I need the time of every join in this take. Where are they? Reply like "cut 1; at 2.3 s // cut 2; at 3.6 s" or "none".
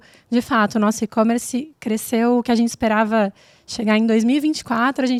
none